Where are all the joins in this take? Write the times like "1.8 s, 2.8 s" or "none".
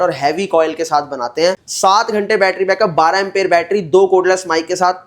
1.7 s